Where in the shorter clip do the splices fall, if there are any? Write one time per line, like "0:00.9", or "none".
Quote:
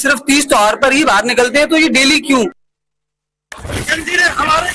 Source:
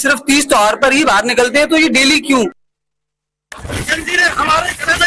none